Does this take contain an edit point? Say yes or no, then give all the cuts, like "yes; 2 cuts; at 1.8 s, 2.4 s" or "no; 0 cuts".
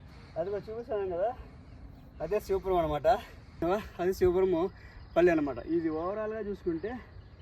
yes; 1 cut; at 3.6 s